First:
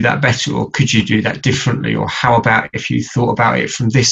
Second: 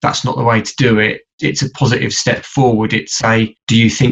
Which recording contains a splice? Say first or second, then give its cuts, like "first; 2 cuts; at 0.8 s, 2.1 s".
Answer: second; 1 cut; at 1.3 s